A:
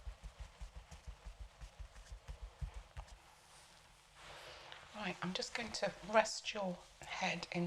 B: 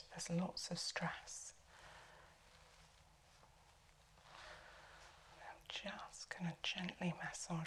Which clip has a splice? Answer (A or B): A